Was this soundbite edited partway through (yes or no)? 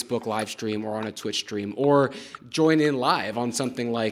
no